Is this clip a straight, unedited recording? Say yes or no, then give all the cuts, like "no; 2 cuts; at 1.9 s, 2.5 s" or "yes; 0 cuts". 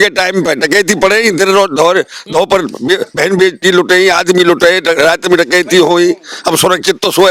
yes; 0 cuts